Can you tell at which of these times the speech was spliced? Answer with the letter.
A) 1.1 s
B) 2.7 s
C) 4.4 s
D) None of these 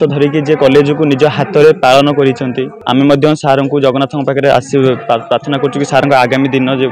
B